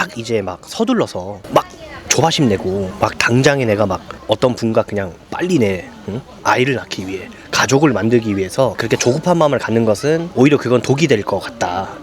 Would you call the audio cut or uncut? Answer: cut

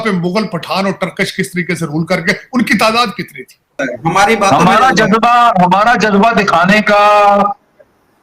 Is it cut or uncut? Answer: cut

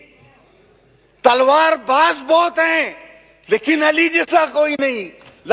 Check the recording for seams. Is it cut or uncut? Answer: uncut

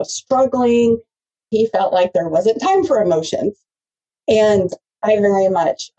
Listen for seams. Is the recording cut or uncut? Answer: cut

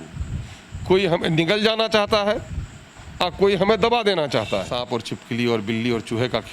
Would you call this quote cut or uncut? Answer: cut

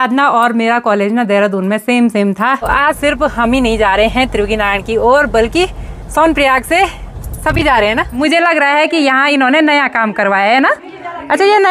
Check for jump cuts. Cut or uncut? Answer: cut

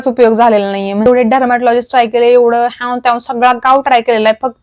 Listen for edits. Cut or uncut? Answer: cut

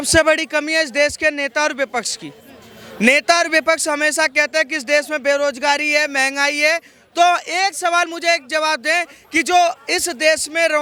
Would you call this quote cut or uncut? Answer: uncut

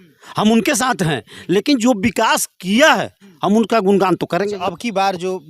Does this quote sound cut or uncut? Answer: uncut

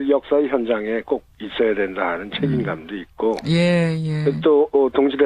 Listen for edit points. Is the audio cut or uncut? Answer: cut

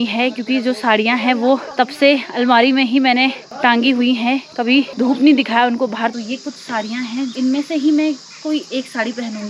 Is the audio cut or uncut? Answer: cut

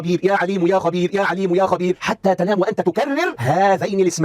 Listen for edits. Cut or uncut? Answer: uncut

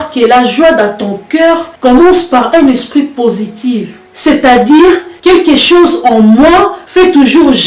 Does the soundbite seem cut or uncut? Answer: uncut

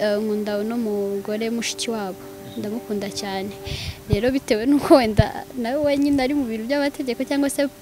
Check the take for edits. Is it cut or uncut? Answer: uncut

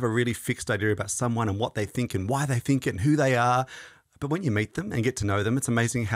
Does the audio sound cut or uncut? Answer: uncut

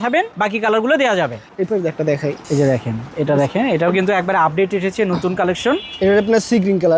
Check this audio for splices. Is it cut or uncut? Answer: uncut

